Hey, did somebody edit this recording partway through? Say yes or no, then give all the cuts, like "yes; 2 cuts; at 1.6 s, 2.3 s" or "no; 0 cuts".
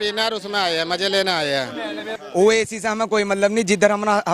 yes; 1 cut; at 2.1 s